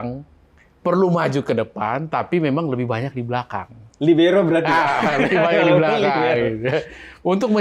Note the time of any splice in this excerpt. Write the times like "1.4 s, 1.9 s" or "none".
none